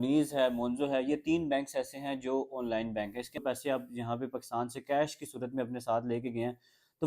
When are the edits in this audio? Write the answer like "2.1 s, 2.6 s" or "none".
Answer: 3.4 s